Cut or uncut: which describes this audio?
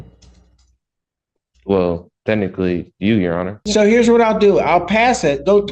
cut